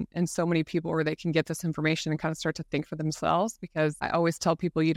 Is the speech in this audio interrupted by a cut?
yes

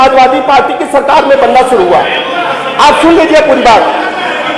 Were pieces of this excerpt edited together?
no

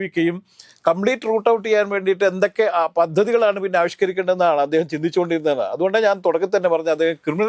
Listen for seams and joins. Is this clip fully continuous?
yes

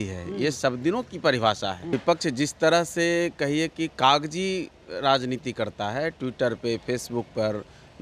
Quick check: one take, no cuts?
no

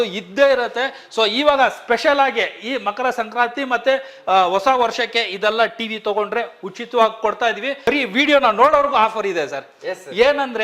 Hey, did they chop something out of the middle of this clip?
yes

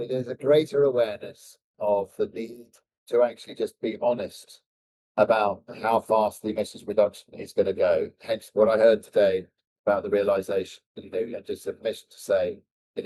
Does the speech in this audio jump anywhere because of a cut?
no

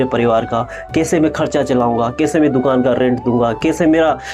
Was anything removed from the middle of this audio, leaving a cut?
no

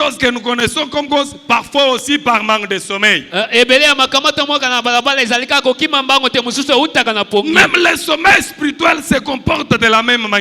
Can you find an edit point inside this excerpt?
no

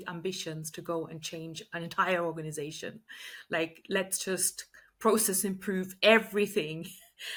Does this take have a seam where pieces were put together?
no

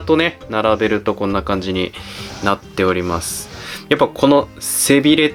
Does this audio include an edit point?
no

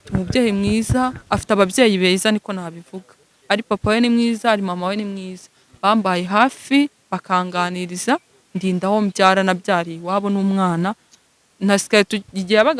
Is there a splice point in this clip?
no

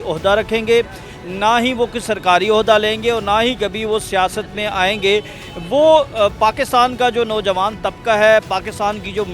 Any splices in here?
no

